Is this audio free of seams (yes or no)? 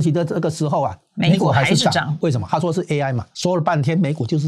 no